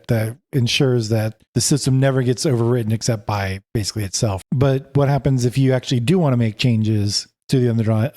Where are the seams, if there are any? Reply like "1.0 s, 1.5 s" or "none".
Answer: 4.4 s